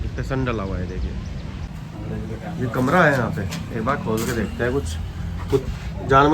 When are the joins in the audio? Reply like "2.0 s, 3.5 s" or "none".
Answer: 1.7 s